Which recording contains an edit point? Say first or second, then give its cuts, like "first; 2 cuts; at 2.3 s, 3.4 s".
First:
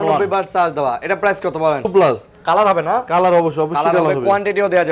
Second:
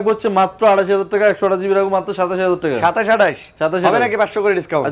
first; 1 cut; at 1.9 s